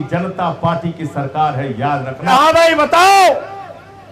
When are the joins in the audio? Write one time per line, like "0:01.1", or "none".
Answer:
0:02.3